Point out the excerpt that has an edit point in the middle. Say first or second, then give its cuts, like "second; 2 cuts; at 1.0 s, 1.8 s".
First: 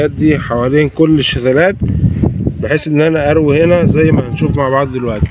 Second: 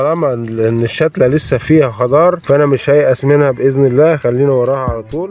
second; 1 cut; at 2.4 s